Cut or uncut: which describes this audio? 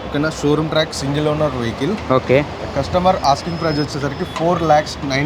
uncut